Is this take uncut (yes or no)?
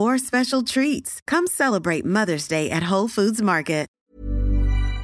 no